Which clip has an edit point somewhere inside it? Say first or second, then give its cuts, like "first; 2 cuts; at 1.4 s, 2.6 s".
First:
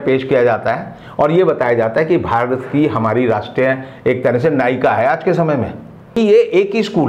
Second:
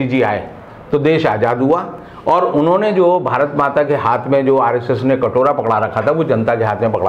first; 1 cut; at 6.1 s